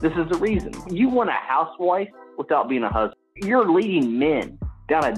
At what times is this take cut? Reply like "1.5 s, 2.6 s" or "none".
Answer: 3.3 s